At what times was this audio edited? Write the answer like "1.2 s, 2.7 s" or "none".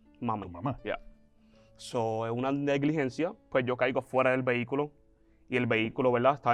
none